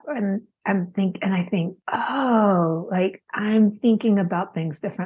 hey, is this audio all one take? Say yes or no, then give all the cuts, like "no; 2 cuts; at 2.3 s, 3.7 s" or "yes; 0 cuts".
no; 1 cut; at 1.8 s